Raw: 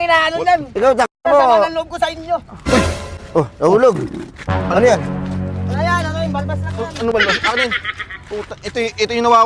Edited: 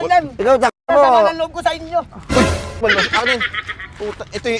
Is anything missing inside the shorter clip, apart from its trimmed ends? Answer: yes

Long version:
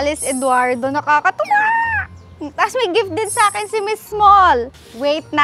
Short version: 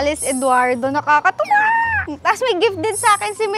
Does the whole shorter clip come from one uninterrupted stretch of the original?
no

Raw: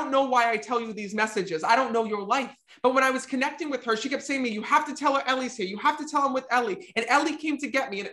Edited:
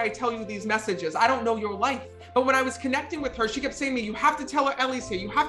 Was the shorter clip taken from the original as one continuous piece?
yes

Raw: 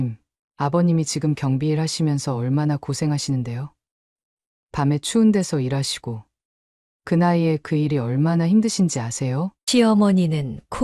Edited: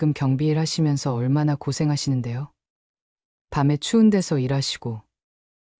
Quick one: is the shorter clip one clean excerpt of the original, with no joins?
yes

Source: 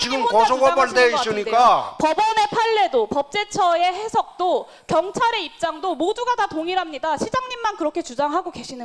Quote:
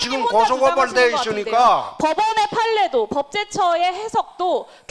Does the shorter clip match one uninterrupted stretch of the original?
yes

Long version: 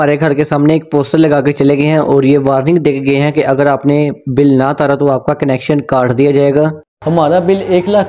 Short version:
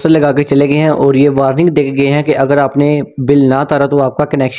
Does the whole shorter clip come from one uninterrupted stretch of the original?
yes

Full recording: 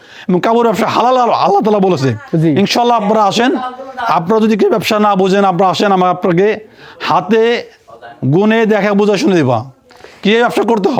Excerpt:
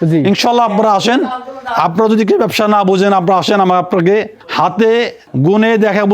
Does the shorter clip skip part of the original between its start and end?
yes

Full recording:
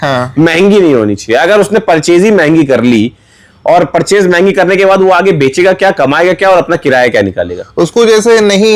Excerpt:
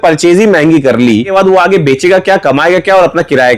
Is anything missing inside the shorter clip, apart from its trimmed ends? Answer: yes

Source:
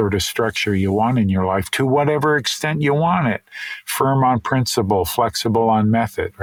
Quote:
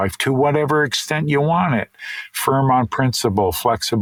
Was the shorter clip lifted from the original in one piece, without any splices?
yes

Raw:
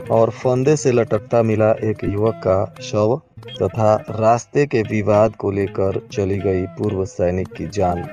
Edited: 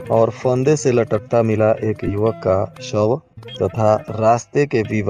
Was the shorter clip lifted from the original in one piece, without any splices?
yes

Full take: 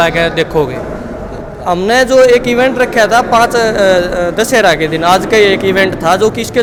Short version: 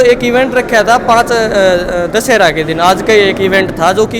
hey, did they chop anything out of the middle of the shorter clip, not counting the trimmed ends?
no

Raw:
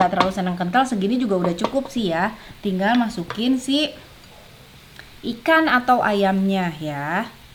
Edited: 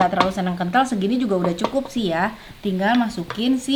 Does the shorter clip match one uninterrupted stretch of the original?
yes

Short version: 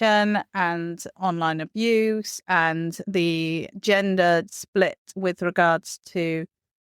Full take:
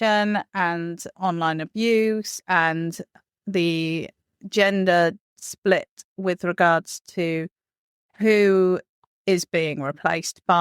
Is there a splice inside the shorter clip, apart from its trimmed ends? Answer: yes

